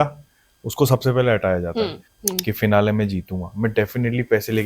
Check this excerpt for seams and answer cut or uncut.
cut